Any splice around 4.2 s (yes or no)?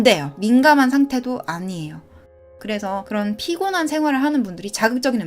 no